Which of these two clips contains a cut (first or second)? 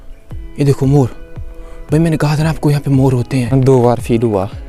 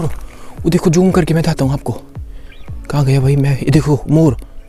first